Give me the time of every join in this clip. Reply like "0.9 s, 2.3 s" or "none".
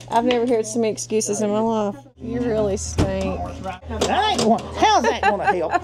2.2 s, 3.8 s